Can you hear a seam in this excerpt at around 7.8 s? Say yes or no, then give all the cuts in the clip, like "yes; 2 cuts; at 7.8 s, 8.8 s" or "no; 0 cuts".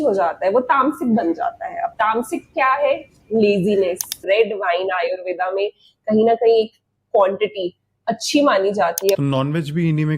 no; 2 cuts; at 4.2 s, 9.1 s